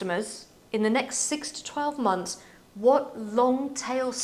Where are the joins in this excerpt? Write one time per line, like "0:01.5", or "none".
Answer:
none